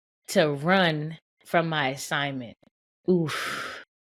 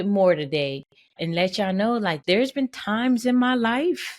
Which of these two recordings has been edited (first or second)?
second